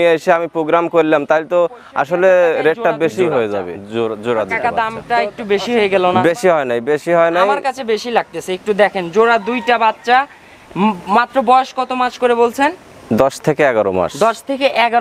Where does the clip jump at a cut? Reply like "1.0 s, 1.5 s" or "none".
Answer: 3.8 s